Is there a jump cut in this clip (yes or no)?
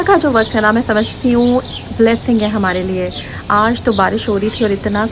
no